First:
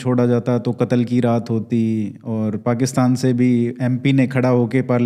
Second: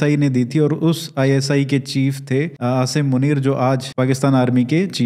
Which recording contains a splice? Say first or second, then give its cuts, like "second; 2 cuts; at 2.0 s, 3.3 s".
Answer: second; 2 cuts; at 2.5 s, 3.9 s